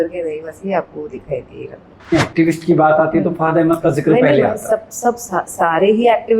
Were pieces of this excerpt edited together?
yes; 1 cut; at 2.0 s

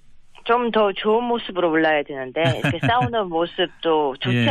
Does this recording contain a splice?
yes; 1 cut; at 1.1 s

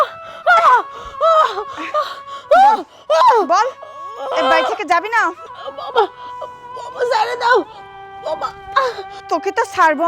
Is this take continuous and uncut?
no; 2 cuts; at 5.4 s, 9.1 s

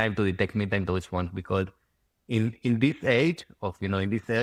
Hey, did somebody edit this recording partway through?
no; 0 cuts

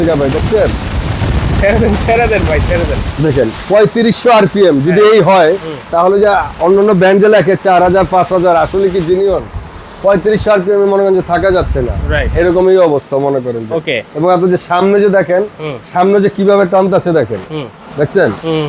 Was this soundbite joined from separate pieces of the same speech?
no; 0 cuts

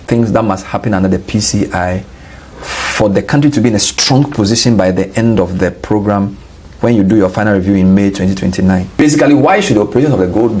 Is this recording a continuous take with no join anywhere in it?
no; 1 cut; at 9.0 s

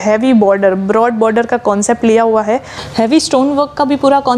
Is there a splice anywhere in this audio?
yes; 1 cut; at 2.8 s

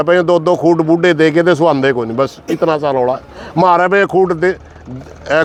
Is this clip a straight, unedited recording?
yes; 0 cuts

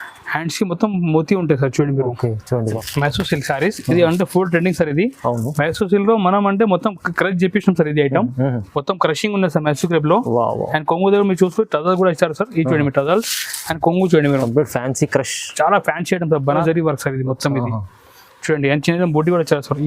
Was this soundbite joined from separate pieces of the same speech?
yes; 2 cuts; at 2.8 s, 16.6 s

